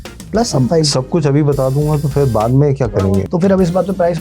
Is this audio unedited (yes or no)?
no